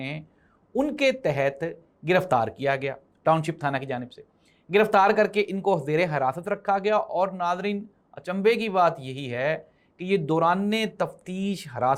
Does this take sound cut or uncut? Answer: uncut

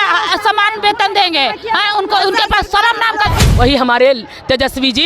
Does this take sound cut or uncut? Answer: cut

